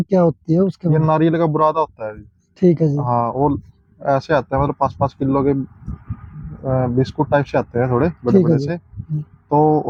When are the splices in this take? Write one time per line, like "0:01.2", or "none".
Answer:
none